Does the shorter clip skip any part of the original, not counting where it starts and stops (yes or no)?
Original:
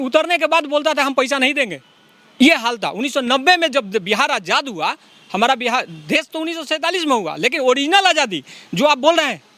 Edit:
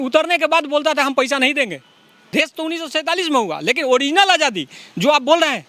yes